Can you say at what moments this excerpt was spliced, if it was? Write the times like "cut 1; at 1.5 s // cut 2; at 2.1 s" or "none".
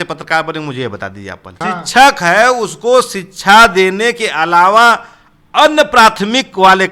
cut 1; at 1.6 s